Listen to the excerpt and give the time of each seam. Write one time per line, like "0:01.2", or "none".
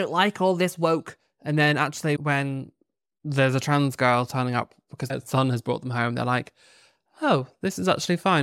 0:02.2
0:05.1